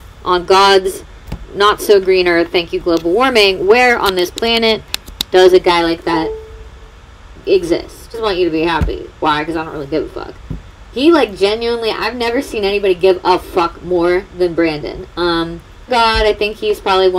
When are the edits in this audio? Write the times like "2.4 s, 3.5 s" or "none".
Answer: none